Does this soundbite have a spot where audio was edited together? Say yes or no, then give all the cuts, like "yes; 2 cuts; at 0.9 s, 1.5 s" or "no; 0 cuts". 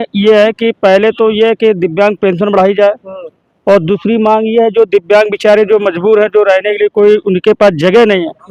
no; 0 cuts